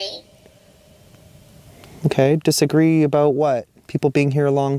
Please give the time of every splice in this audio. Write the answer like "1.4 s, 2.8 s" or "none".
3.8 s